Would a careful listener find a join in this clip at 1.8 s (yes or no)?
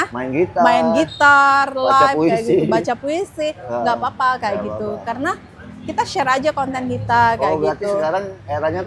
no